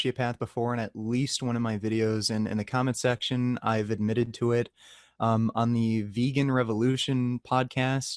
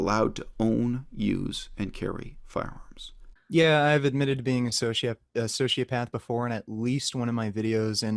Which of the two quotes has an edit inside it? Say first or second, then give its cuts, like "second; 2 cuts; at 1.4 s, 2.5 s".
second; 1 cut; at 3.4 s